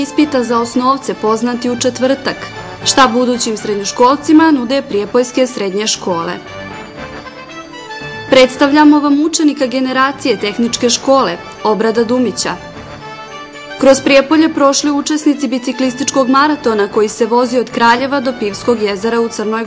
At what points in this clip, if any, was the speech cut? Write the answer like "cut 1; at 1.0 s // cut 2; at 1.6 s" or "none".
cut 1; at 6.4 s // cut 2; at 7.8 s